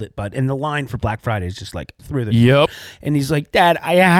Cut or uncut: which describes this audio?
cut